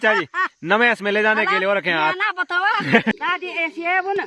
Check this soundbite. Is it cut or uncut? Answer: cut